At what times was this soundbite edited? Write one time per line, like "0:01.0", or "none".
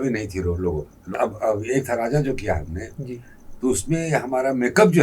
0:01.2